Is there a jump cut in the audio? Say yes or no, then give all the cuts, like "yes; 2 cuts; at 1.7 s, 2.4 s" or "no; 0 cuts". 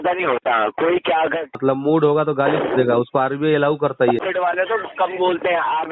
yes; 2 cuts; at 1.6 s, 4.2 s